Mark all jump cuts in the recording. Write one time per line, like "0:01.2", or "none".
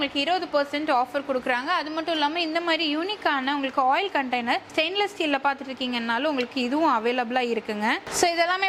none